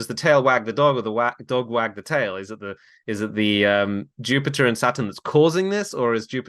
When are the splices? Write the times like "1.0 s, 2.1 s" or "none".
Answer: none